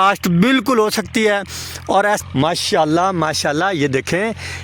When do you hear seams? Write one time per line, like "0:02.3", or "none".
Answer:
0:02.2